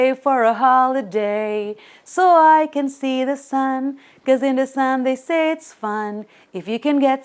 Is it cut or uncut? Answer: uncut